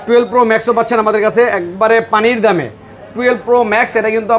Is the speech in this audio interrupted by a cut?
no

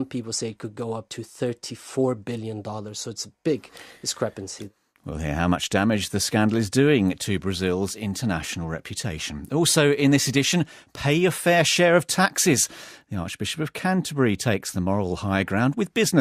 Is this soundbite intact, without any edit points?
no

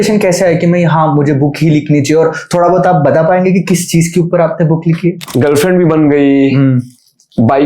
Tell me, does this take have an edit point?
yes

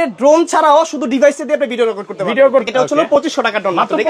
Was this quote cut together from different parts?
yes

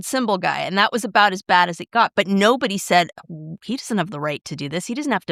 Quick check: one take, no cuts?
yes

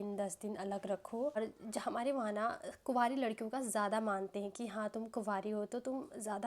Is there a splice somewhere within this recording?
yes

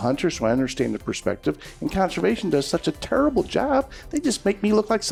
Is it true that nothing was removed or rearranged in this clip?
yes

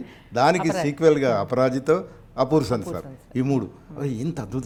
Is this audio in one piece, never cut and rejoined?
yes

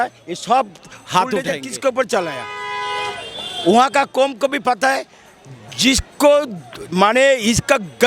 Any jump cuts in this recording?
yes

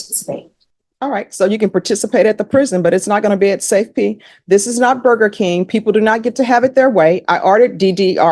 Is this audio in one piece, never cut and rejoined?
yes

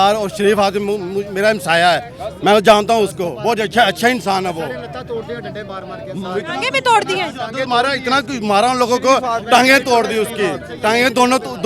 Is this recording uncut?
yes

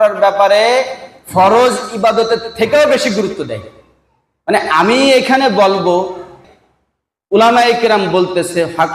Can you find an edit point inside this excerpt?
yes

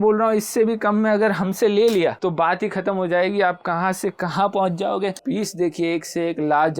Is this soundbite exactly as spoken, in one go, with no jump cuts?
no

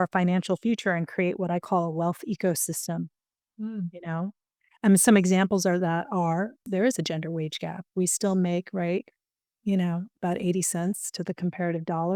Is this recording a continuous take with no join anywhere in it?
yes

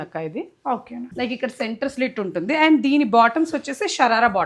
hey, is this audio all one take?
no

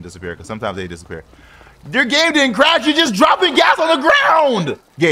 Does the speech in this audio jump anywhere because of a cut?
no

